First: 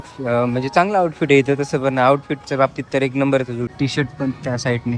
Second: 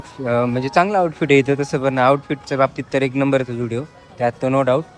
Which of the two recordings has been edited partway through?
first; 1 cut; at 3.7 s

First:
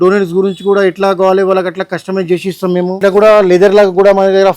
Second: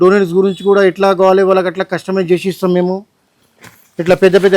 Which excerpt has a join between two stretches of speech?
first; 1 cut; at 3.0 s

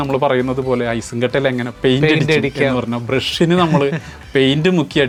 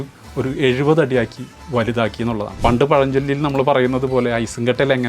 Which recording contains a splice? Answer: second; 1 cut; at 2.5 s

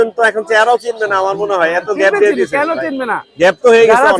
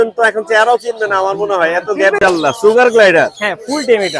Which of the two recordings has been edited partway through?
second; 1 cut; at 2.2 s

